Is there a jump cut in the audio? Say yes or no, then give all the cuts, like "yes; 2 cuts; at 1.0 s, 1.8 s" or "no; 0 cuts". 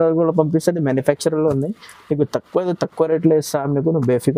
no; 0 cuts